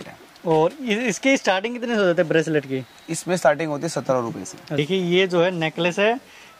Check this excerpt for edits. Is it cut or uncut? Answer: cut